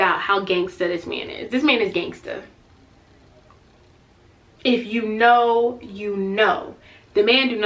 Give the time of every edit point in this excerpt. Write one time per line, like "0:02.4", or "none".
none